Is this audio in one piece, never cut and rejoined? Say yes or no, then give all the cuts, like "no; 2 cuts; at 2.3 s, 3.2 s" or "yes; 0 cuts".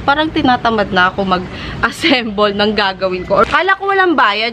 no; 1 cut; at 3.5 s